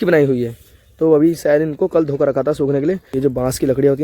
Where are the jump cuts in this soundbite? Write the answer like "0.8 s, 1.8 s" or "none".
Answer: 3.0 s

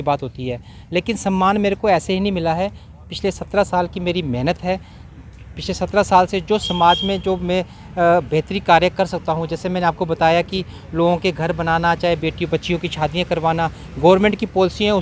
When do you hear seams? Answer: none

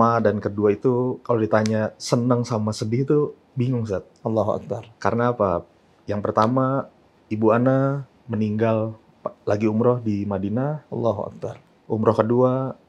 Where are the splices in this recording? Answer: 1.2 s

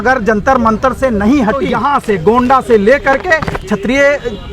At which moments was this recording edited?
1.7 s

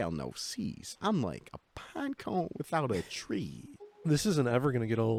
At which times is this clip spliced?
none

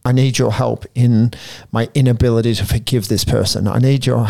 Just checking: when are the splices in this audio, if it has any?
none

